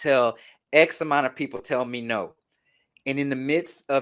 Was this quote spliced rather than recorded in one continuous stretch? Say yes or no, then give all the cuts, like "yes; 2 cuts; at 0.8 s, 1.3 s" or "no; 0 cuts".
no; 0 cuts